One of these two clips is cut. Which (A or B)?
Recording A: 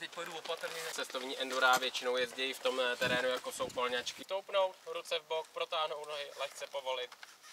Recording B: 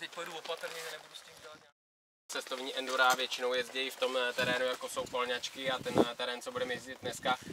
A